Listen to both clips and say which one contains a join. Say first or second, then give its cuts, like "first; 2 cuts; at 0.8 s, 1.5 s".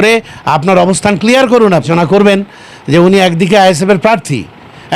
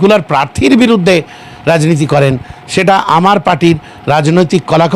first; 1 cut; at 1.9 s